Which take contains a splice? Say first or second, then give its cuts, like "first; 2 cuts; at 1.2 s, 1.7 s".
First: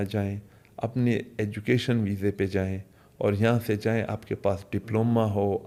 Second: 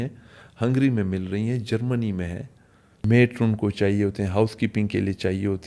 second; 1 cut; at 3.0 s